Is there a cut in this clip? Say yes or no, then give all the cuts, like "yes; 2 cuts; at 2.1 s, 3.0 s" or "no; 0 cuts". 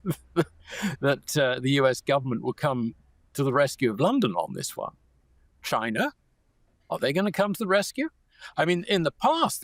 no; 0 cuts